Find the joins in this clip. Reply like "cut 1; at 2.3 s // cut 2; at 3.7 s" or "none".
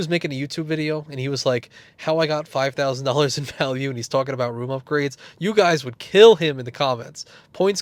none